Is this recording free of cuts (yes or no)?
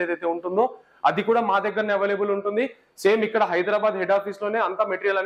yes